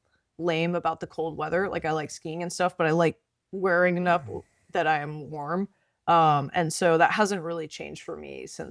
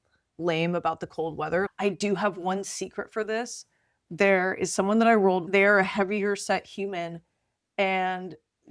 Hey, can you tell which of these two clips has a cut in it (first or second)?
second